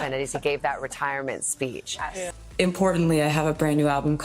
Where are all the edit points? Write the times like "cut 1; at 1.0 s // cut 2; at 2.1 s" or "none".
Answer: cut 1; at 2.4 s